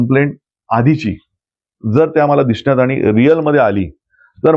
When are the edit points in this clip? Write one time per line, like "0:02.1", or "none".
none